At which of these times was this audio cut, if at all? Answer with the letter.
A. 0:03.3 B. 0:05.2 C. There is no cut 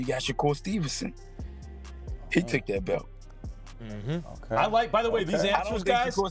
C